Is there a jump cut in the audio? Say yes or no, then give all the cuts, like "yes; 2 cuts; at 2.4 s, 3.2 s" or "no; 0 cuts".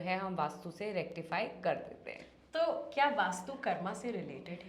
no; 0 cuts